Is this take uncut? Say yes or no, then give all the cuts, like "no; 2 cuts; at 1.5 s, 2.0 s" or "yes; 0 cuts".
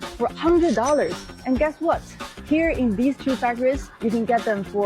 yes; 0 cuts